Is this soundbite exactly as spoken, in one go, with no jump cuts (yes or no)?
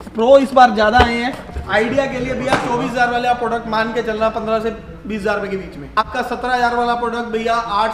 no